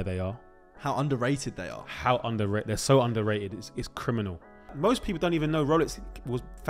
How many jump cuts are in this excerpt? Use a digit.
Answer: 1